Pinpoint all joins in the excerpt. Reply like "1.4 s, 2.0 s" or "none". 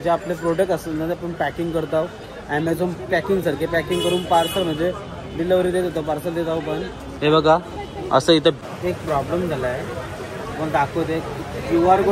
8.6 s